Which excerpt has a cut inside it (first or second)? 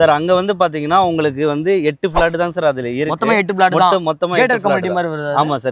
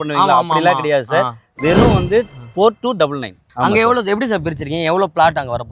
second